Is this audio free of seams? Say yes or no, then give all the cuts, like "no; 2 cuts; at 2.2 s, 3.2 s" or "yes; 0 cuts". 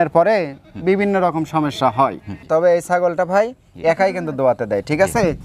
no; 1 cut; at 2.4 s